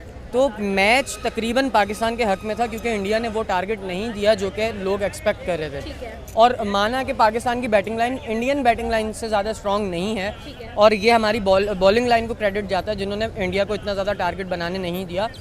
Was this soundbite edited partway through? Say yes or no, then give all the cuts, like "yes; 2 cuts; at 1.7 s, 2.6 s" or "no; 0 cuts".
no; 0 cuts